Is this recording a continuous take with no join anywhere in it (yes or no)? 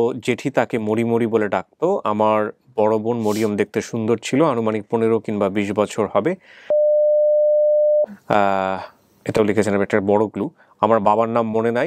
yes